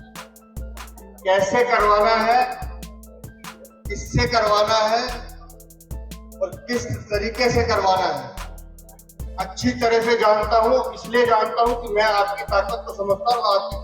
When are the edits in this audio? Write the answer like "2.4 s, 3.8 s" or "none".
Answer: 1.2 s